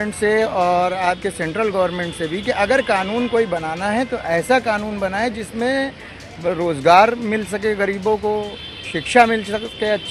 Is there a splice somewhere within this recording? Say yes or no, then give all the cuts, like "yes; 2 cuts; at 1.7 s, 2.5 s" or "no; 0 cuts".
no; 0 cuts